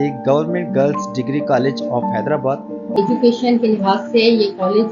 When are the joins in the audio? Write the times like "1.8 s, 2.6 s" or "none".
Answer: 2.9 s